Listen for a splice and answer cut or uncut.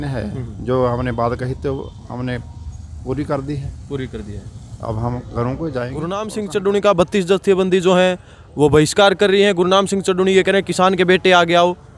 cut